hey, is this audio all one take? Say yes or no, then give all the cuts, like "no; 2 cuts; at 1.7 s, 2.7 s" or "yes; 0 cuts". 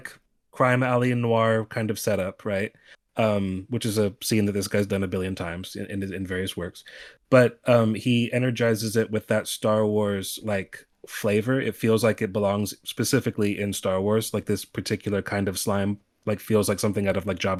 yes; 0 cuts